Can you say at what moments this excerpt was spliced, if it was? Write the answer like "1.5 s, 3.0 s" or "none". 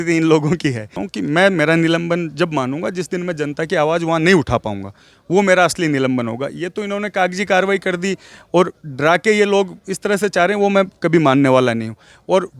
1.0 s